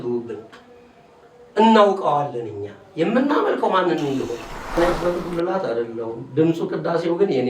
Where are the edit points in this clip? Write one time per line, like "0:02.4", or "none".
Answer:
0:04.8